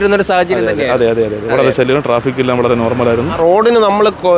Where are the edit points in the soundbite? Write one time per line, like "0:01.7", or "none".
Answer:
0:03.3